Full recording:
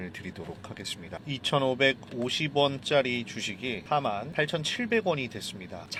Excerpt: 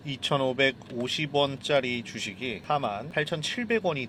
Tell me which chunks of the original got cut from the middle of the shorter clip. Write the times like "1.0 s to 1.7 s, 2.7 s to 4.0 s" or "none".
none